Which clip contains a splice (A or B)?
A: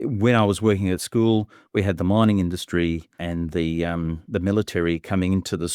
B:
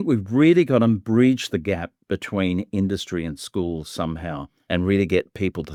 A